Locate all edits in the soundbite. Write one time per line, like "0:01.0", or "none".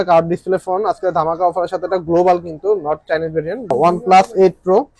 0:03.7